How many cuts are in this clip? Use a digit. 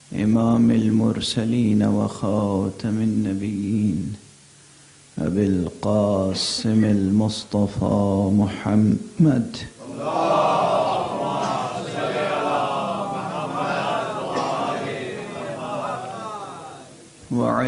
1